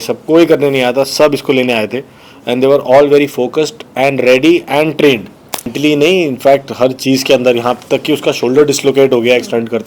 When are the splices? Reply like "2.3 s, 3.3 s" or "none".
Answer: 5.7 s